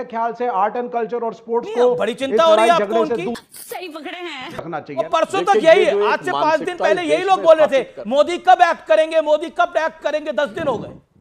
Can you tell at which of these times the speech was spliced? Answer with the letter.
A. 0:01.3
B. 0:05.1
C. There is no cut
B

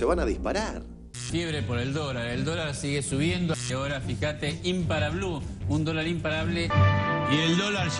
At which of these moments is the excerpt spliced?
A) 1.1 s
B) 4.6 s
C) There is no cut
A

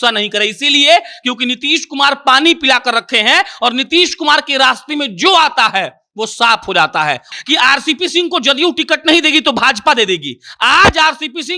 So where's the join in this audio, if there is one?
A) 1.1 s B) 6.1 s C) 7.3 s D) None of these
C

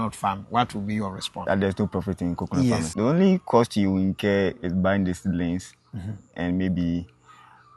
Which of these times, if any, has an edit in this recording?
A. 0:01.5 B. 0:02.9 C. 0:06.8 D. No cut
B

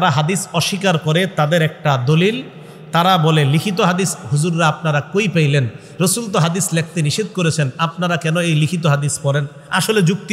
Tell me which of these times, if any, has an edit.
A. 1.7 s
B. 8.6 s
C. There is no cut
C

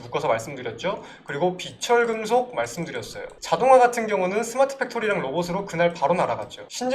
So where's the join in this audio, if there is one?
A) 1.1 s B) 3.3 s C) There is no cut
B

